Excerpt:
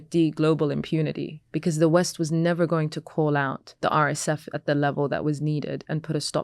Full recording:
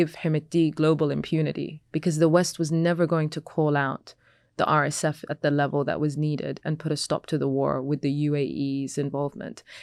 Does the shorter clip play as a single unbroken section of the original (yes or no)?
no